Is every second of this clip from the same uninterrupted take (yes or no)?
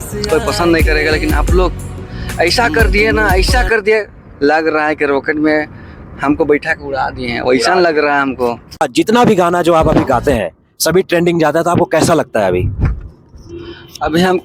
no